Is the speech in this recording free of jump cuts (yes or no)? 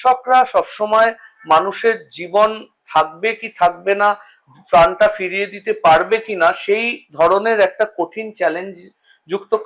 yes